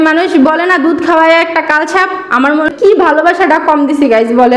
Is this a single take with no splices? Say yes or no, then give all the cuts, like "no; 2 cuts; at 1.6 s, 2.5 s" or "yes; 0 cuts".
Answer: no; 1 cut; at 2.7 s